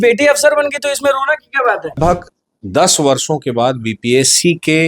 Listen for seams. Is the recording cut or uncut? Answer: cut